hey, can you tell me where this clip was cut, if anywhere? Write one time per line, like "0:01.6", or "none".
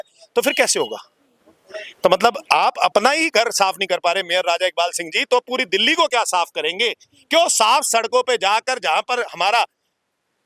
none